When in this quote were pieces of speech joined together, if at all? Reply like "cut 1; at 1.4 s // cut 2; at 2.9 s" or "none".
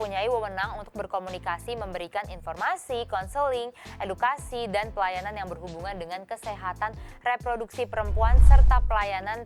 none